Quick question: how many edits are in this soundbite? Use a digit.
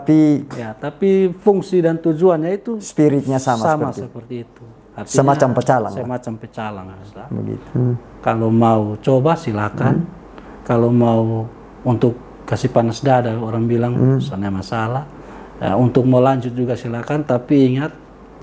1